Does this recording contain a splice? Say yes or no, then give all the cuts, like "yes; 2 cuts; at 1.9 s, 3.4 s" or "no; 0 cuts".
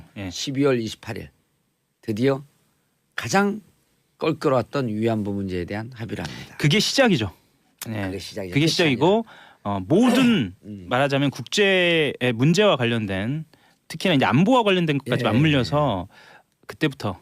yes; 1 cut; at 13.7 s